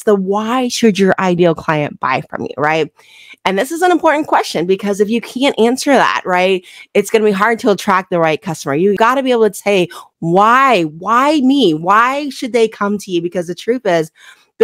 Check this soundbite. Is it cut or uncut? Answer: uncut